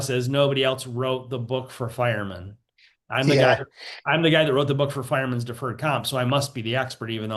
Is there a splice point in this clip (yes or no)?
no